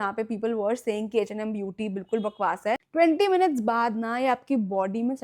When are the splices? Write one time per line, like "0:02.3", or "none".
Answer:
0:02.8